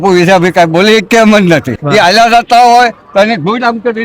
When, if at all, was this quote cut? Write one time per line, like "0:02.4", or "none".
0:01.8

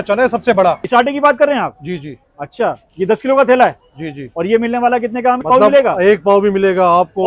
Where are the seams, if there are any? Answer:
0:00.8
0:05.5

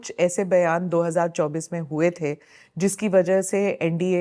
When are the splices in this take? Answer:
none

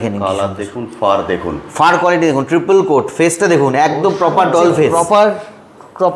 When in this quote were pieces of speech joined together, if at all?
0:04.9

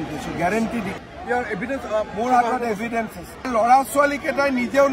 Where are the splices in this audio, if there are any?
0:01.0
0:03.5

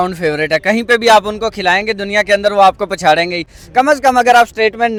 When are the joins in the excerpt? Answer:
none

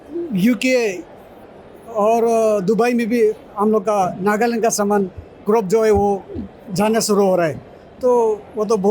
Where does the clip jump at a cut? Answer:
none

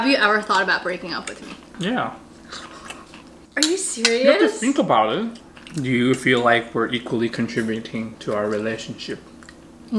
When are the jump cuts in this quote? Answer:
0:01.7
0:05.5

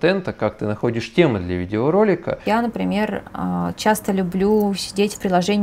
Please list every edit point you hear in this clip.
0:02.4

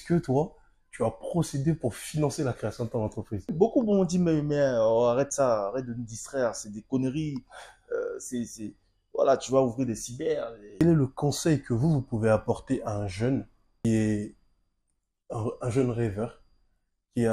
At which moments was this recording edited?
0:03.5
0:10.7
0:13.8

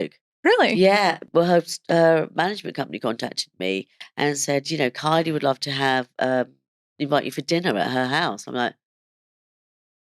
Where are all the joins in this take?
0:01.2

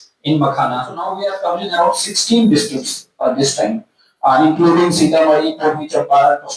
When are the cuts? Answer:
0:01.0

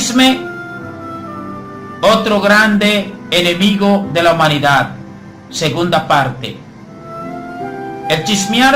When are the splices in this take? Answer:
0:04.6

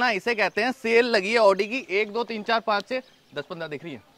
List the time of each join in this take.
none

